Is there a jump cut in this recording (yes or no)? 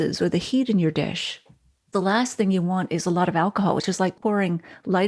yes